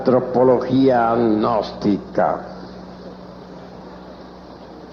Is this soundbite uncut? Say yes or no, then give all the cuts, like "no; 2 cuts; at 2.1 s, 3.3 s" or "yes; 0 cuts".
yes; 0 cuts